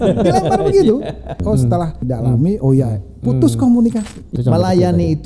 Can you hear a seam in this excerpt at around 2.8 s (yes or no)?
no